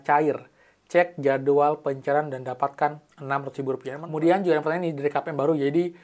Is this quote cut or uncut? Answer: cut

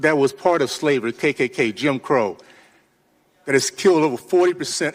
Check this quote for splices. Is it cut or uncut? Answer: uncut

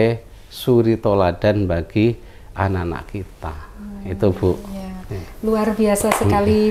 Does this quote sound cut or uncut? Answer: uncut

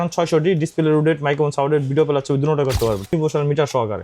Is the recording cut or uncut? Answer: cut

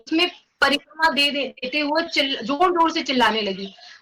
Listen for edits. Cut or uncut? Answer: uncut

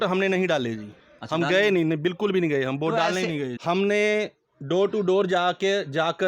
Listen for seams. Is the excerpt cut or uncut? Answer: cut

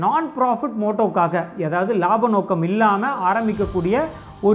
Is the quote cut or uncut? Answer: uncut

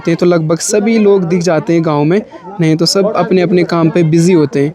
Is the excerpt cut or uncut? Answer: uncut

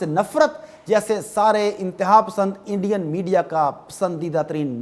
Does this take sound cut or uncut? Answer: uncut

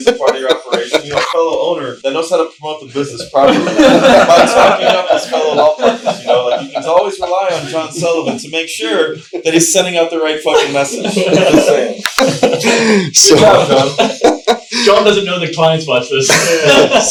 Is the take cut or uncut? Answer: uncut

